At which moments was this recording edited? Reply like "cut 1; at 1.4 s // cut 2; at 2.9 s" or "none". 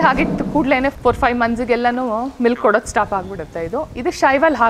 cut 1; at 0.9 s